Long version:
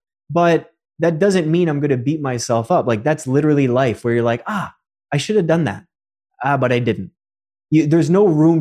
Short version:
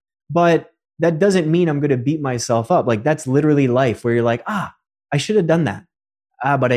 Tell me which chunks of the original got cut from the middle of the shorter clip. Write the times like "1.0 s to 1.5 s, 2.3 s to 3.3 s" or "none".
none